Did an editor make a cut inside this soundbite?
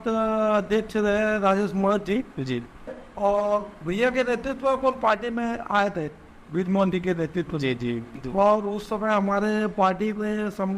yes; 2 cuts; at 3.0 s, 8.1 s

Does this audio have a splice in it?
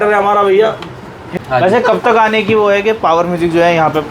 yes; 1 cut; at 1.3 s

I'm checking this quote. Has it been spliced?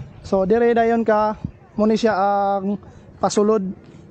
no; 0 cuts

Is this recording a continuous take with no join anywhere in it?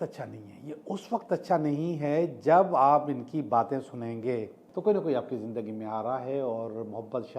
no; 1 cut; at 4.6 s

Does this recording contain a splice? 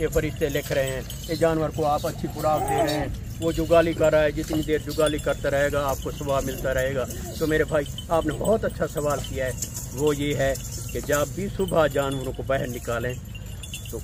no; 0 cuts

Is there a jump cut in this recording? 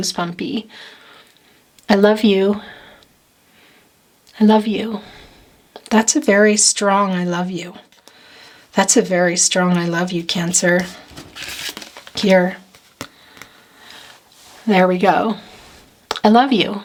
no; 0 cuts

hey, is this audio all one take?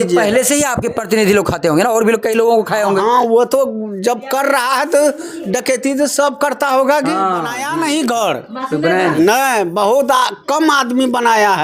no; 1 cut; at 7.6 s

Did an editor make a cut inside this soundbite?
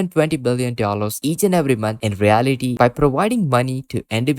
yes; 1 cut; at 2.7 s

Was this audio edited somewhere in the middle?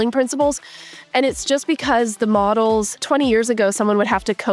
yes; 1 cut; at 3.0 s

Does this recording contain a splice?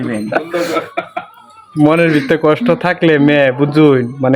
no; 0 cuts

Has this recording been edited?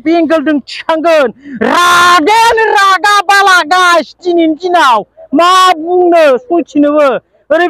no; 0 cuts

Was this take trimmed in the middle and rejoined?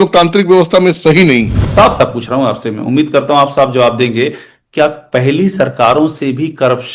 yes; 1 cut; at 1.7 s

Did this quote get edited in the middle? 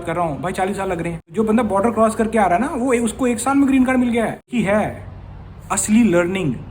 yes; 2 cuts; at 1.3 s, 4.5 s

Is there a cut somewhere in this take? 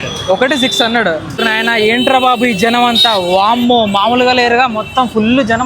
yes; 1 cut; at 1.3 s

